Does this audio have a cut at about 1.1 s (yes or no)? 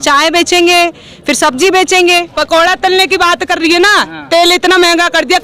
no